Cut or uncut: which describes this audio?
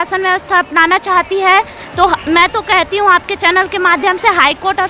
uncut